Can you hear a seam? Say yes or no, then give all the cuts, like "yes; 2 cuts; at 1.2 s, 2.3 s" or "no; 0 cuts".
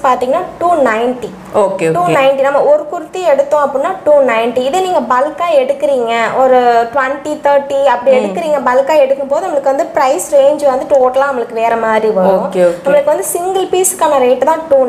no; 0 cuts